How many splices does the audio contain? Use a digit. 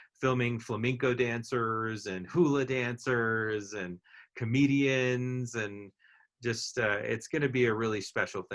0